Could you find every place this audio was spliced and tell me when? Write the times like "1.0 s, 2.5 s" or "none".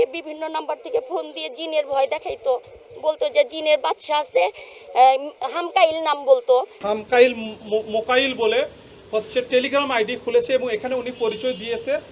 6.8 s